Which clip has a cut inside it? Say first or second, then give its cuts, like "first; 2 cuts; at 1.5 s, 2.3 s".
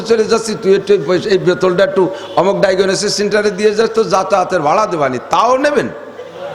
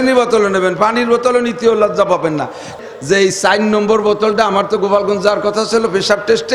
second; 1 cut; at 2.7 s